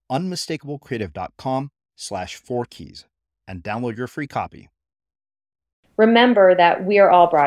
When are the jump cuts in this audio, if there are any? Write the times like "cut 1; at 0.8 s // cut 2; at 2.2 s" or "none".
cut 1; at 5.8 s